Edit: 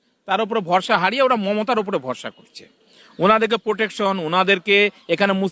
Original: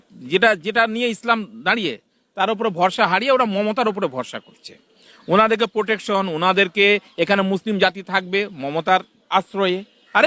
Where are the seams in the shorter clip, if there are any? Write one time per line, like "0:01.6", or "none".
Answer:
none